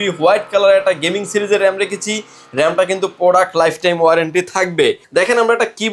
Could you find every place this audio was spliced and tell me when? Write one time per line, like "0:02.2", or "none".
0:05.0